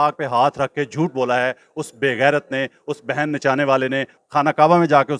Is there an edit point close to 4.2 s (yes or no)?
yes